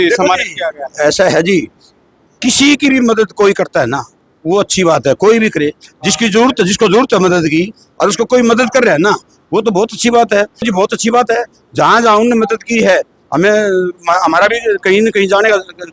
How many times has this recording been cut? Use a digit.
0